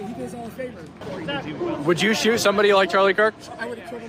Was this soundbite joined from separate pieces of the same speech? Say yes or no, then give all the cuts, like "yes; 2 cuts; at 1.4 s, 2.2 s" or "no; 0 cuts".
no; 0 cuts